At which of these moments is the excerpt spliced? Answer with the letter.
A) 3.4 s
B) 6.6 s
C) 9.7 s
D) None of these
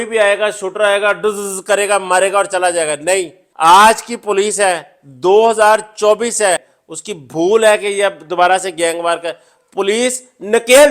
B